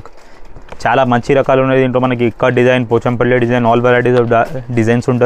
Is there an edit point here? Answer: no; 0 cuts

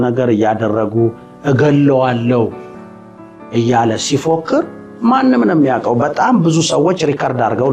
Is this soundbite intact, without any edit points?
yes; 0 cuts

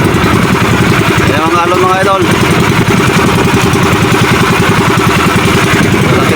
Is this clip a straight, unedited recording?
yes; 0 cuts

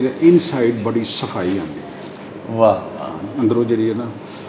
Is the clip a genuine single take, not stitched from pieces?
yes; 0 cuts

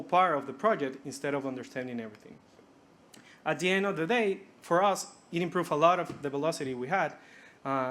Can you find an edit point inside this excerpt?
no; 0 cuts

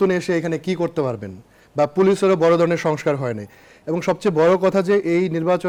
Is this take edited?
no; 0 cuts

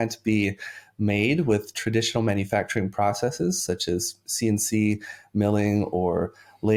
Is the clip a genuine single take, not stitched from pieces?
yes; 0 cuts

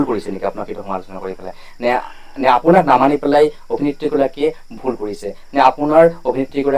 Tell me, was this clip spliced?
no; 0 cuts

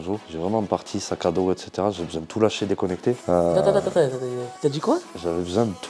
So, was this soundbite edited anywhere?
no; 0 cuts

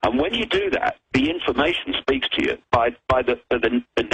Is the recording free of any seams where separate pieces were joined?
yes; 0 cuts

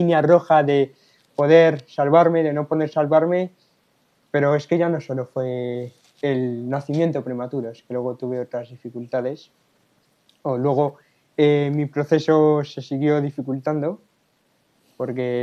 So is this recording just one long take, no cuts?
yes; 0 cuts

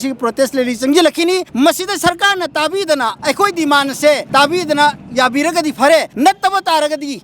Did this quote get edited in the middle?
yes; 4 cuts; at 1.5 s, 3.1 s, 4.2 s, 6.1 s

